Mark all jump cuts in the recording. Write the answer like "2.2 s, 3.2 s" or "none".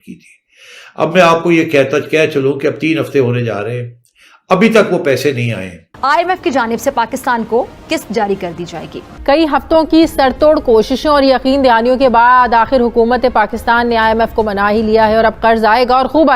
5.8 s, 9.1 s